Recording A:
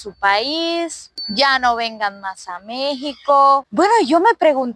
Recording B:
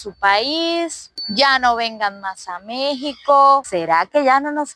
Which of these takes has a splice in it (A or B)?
B